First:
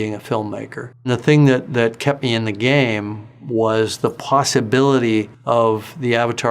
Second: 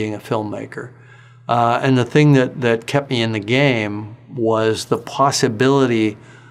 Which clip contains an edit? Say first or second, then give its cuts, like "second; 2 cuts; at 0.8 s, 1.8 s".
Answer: first; 2 cuts; at 1.1 s, 5.4 s